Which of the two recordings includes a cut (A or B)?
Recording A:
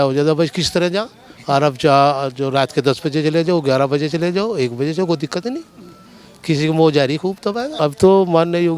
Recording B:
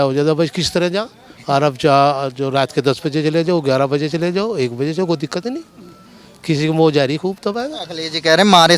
A